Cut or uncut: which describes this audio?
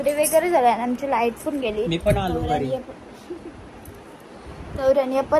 uncut